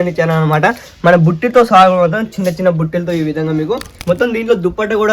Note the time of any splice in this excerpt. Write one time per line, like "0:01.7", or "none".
0:03.9